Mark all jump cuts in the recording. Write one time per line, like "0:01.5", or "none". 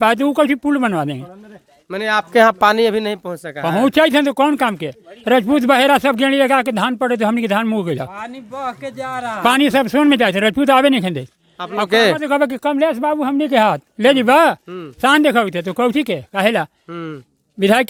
none